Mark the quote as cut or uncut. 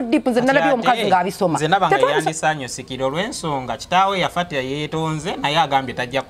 uncut